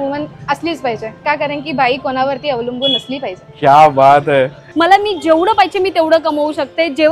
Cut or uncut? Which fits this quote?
cut